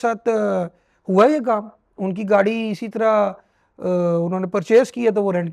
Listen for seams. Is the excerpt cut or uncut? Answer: uncut